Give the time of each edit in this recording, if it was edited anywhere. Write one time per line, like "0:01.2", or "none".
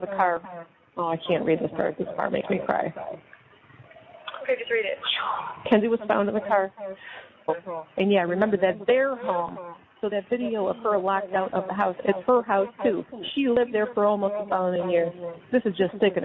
0:07.5